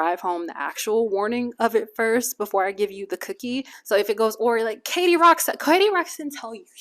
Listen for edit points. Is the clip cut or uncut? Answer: cut